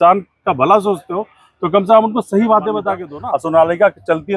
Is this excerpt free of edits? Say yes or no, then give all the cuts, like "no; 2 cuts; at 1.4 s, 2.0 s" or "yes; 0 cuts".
no; 1 cut; at 3.0 s